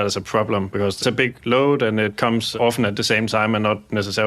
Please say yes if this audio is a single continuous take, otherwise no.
yes